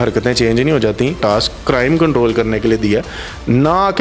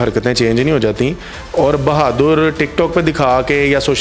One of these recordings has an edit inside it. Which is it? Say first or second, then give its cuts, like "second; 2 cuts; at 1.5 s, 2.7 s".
first; 1 cut; at 1.2 s